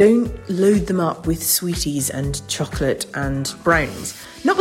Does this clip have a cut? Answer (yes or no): no